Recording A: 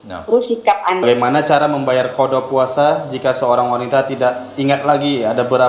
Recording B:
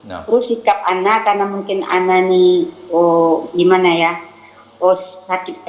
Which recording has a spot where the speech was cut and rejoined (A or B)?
A